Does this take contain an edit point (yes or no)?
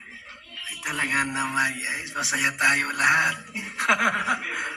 no